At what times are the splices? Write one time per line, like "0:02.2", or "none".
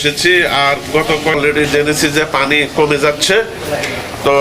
0:01.4